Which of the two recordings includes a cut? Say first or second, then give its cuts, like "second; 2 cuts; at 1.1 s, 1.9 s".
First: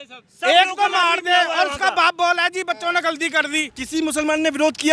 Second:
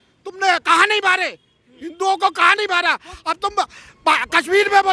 first; 1 cut; at 3.5 s